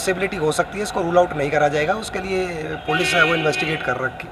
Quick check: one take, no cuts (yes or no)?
yes